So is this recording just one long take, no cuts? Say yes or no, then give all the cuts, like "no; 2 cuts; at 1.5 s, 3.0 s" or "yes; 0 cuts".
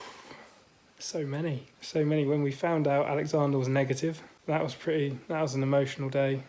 no; 2 cuts; at 1.7 s, 4.3 s